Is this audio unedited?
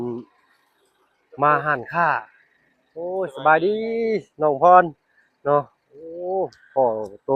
yes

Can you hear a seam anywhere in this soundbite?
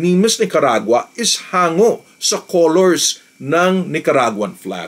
no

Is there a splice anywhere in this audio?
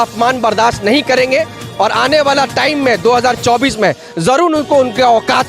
no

